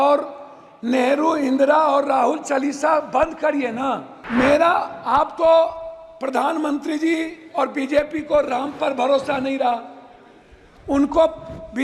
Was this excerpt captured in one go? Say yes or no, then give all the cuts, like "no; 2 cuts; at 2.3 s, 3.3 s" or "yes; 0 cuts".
no; 1 cut; at 4.1 s